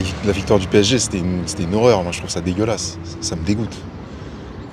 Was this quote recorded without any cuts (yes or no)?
yes